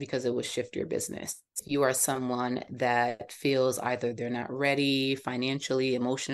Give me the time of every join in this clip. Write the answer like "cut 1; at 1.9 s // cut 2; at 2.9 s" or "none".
cut 1; at 1.6 s